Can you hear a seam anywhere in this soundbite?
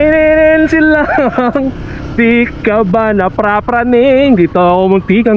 no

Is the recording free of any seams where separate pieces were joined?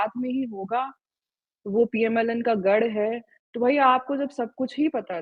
yes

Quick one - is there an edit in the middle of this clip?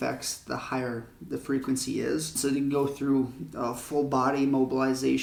no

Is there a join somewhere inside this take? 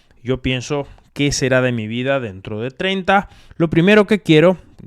yes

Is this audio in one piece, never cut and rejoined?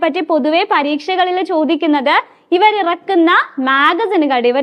yes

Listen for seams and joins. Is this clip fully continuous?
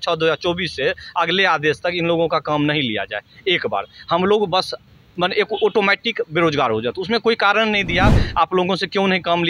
yes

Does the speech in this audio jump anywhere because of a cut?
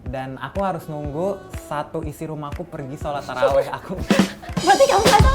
no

